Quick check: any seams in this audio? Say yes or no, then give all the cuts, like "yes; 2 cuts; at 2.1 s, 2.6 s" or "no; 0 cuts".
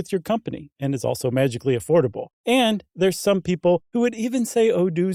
no; 0 cuts